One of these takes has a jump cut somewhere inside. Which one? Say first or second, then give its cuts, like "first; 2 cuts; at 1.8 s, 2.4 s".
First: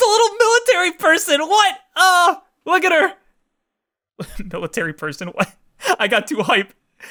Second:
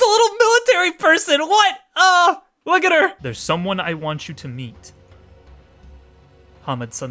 second; 1 cut; at 3.2 s